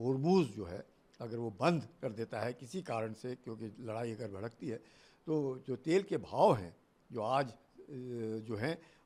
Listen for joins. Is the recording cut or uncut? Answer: uncut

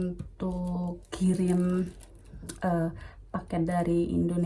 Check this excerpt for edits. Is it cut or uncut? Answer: uncut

